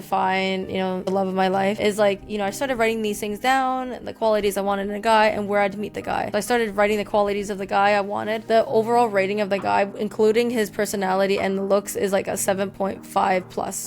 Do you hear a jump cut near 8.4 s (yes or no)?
yes